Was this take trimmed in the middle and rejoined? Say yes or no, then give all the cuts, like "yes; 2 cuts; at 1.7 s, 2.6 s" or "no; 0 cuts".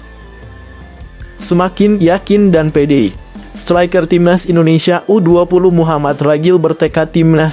yes; 1 cut; at 1.5 s